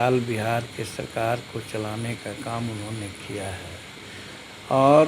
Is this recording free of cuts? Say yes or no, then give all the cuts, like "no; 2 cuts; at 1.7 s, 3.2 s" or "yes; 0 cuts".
yes; 0 cuts